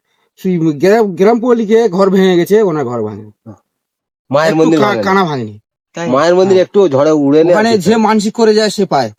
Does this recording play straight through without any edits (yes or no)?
yes